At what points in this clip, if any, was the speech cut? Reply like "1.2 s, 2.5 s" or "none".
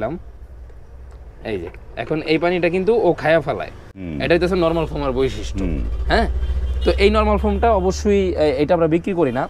none